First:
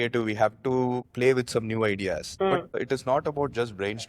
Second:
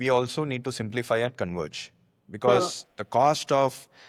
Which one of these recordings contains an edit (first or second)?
first